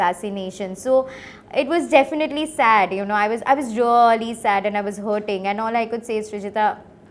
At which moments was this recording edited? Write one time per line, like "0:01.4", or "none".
none